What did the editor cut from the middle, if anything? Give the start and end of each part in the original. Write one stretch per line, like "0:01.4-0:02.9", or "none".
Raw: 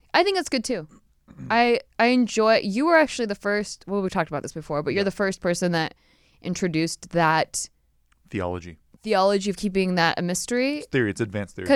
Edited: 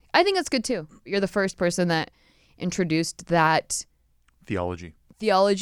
0:01.1-0:04.9